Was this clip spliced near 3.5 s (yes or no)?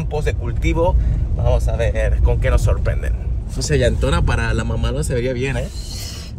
no